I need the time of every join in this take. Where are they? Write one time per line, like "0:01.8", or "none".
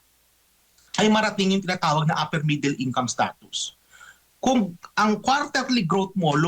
none